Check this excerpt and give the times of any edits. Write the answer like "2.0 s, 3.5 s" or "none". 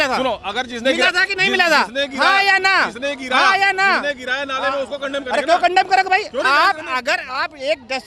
none